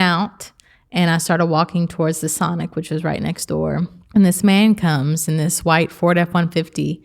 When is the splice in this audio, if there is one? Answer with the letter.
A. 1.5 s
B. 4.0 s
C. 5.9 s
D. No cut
B